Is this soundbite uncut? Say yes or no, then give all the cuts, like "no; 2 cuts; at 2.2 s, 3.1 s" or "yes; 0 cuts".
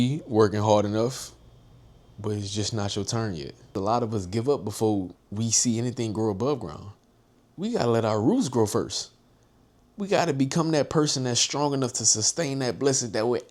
no; 2 cuts; at 3.7 s, 5.2 s